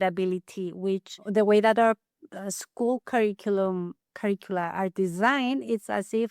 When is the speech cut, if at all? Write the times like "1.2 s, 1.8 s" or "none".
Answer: 1.2 s